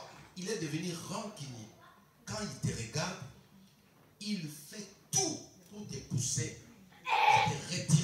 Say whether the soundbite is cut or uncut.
uncut